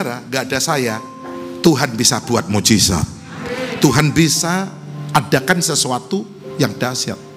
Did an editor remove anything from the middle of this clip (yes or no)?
no